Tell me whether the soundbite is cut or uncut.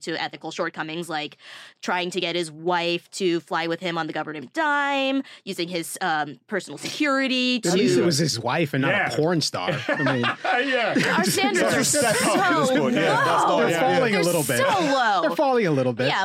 uncut